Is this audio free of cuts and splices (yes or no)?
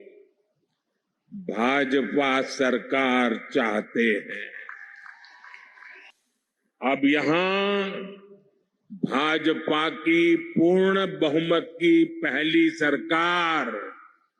no